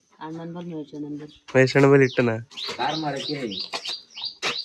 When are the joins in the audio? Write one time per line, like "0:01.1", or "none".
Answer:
0:02.6